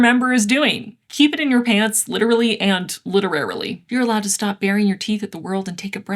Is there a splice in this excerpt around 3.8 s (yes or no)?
yes